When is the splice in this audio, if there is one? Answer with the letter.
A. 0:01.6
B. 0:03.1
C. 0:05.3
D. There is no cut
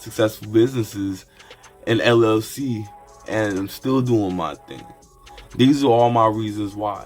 C